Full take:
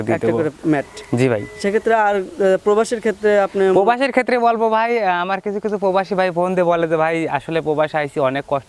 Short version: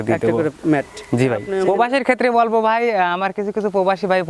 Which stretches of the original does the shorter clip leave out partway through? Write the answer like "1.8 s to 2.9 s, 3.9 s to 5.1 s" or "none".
1.5 s to 3.6 s